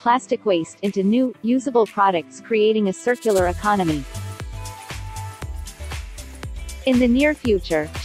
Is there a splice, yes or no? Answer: yes